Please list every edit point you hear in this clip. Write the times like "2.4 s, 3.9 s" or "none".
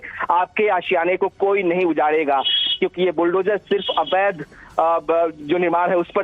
5.0 s